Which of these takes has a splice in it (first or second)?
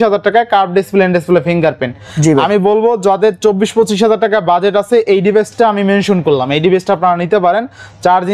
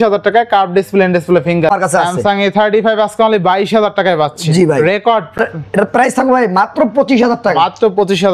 second